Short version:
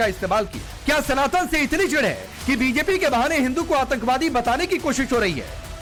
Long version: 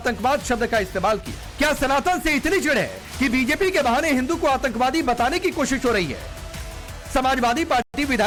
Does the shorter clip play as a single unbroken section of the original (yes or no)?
yes